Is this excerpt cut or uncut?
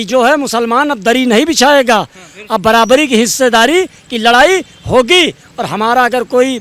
uncut